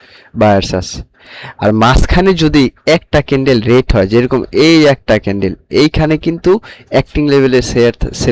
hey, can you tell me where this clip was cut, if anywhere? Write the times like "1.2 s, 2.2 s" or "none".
none